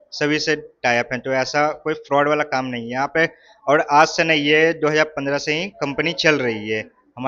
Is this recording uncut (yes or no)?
yes